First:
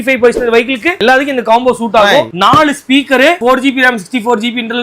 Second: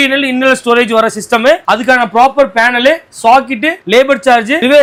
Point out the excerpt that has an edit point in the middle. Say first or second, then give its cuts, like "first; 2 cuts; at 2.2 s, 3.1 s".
first; 2 cuts; at 2.3 s, 3.4 s